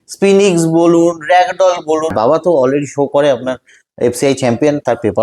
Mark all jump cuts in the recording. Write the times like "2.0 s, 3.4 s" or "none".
2.1 s